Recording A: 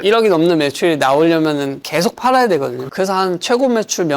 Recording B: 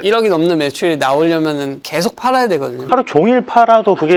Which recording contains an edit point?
A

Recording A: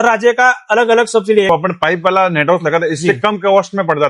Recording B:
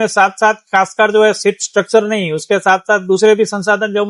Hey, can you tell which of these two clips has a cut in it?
A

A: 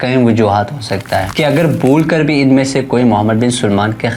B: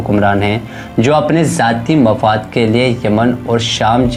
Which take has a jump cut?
A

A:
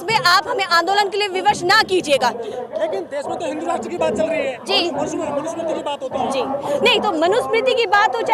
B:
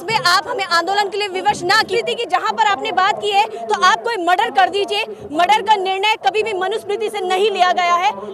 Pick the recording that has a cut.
B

